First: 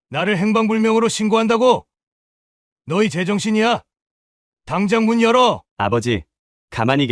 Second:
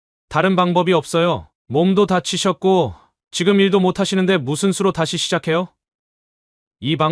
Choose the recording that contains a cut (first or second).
first